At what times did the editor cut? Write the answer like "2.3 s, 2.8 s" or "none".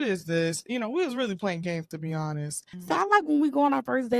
2.7 s